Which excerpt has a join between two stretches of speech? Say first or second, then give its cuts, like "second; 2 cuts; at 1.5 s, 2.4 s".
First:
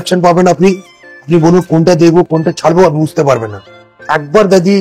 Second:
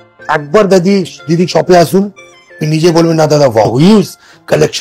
second; 1 cut; at 3.7 s